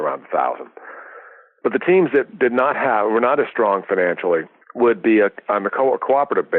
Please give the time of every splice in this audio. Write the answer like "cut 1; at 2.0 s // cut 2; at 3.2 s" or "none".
cut 1; at 4.6 s

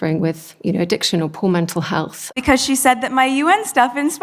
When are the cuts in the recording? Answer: cut 1; at 2.3 s

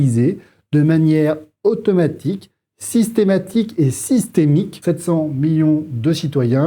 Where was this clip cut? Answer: cut 1; at 4.7 s

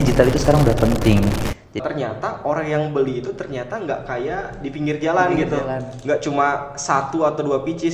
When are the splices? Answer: cut 1; at 1.8 s

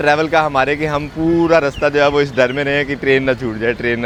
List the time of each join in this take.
none

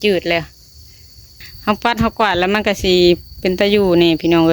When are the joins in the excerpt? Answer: cut 1; at 1.3 s

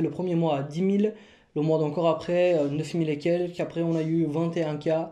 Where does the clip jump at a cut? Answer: none

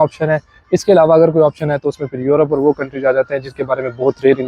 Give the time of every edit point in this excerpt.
none

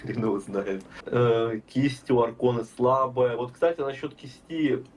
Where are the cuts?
cut 1; at 0.9 s

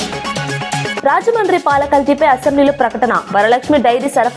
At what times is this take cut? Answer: cut 1; at 1.0 s

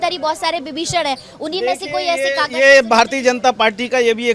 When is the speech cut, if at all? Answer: none

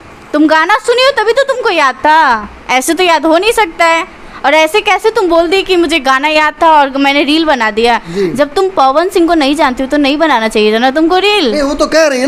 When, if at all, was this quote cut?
none

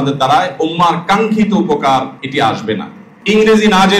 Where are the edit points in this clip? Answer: cut 1; at 2.2 s // cut 2; at 3.1 s

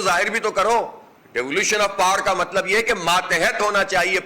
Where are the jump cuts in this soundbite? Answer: cut 1; at 1.0 s

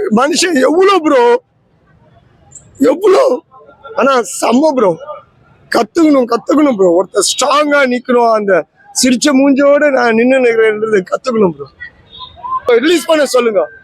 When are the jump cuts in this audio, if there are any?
cut 1; at 12.6 s

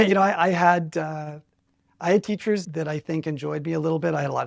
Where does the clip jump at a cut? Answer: cut 1; at 2.6 s

